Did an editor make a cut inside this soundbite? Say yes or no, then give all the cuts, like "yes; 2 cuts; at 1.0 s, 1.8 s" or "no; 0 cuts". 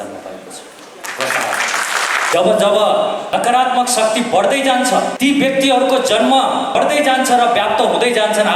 yes; 4 cuts; at 2.3 s, 3.2 s, 5.1 s, 6.8 s